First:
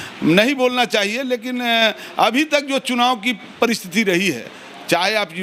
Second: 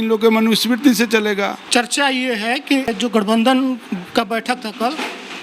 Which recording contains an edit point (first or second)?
second